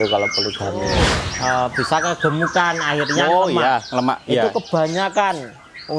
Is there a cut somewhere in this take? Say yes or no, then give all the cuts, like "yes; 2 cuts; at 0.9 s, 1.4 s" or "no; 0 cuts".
yes; 1 cut; at 1.0 s